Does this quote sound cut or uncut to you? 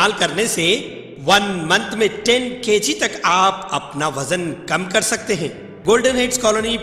cut